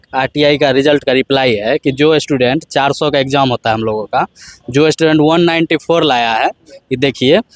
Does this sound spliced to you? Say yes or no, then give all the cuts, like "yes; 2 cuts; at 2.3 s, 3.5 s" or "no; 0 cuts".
no; 0 cuts